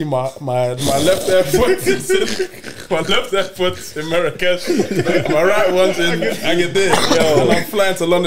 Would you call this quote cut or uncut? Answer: uncut